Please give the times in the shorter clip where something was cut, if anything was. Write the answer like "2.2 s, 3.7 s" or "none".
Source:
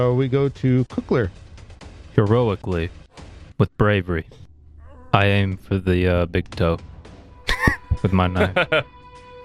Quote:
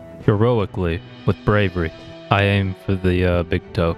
1.1 s, 2.1 s